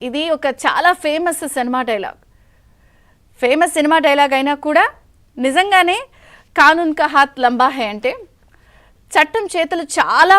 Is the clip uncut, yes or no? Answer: no